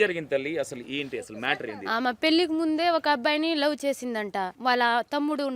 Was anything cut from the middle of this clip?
yes; 1 cut; at 4.5 s

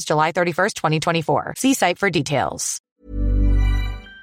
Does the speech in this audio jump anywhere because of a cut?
yes; 1 cut; at 2.8 s

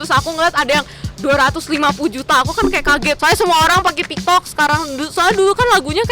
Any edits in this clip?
yes; 1 cut; at 3.1 s

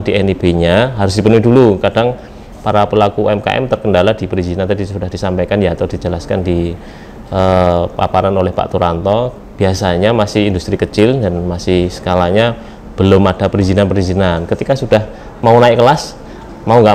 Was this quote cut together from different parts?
no; 0 cuts

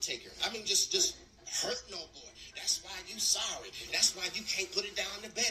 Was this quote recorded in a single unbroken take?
yes; 0 cuts

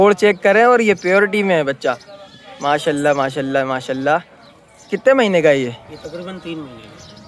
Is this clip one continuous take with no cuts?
yes; 0 cuts

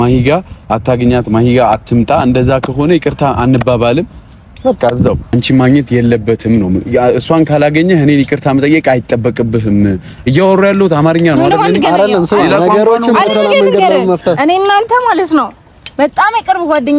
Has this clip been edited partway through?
yes; 1 cut; at 5.3 s

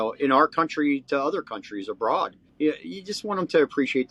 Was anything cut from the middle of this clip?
yes; 1 cut; at 2.4 s

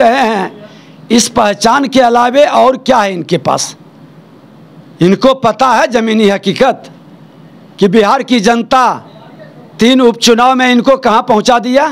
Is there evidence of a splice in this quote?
no; 0 cuts

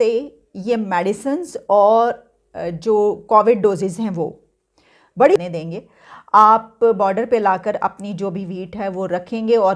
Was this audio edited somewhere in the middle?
yes; 1 cut; at 5.4 s

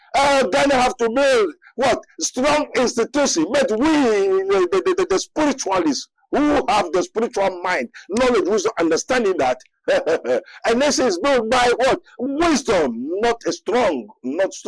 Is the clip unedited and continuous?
yes; 0 cuts

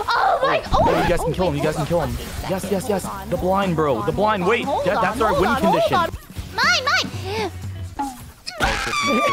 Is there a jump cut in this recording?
yes; 1 cut; at 6.1 s

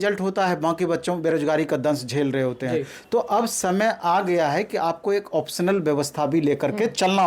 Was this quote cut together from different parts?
no; 0 cuts

